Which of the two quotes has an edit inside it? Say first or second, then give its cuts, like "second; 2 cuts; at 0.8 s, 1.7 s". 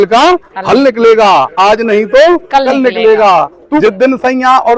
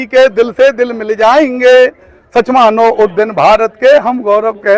first; 1 cut; at 3.8 s